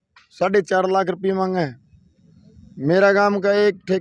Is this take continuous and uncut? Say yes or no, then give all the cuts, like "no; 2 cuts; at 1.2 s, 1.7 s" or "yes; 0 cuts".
yes; 0 cuts